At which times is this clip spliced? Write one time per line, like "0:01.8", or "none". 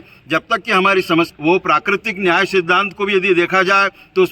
0:01.3